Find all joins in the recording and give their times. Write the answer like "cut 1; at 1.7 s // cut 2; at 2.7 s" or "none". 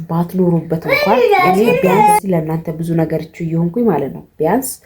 cut 1; at 2.2 s